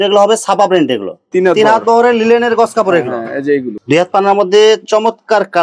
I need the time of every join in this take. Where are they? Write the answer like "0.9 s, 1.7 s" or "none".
1.2 s, 3.7 s